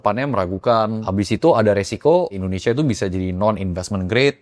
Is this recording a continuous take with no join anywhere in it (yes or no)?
no